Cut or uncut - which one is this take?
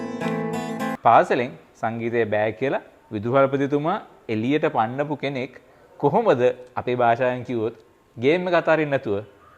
cut